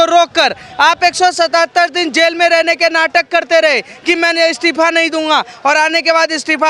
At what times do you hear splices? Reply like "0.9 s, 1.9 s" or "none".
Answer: none